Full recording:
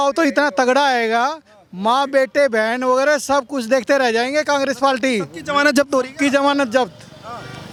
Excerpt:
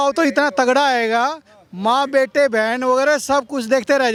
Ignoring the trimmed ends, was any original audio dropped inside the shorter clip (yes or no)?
no